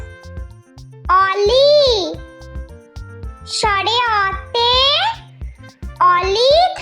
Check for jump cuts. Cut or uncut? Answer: cut